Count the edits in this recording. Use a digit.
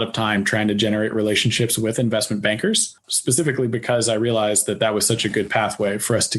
1